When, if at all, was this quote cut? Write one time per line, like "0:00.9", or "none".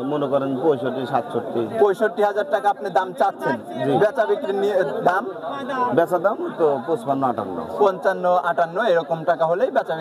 none